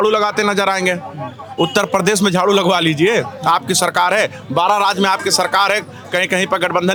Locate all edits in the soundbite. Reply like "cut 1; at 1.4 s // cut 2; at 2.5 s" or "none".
none